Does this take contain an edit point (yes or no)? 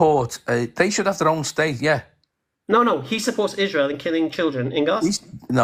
no